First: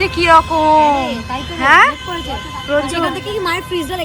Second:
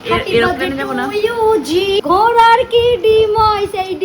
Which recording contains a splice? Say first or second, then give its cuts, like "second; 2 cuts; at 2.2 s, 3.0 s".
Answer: second; 1 cut; at 2.0 s